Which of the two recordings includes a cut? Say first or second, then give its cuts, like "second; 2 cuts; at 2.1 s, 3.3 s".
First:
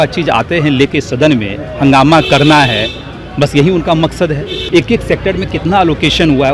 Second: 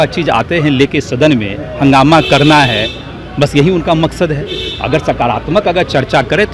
first; 1 cut; at 4.5 s